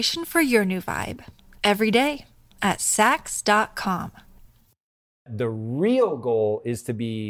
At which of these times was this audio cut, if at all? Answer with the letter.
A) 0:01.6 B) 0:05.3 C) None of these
B